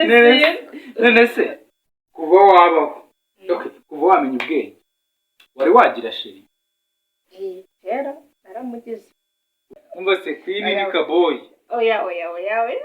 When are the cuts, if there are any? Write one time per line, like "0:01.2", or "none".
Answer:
0:09.8